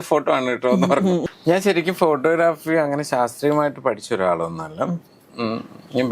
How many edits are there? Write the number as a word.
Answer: one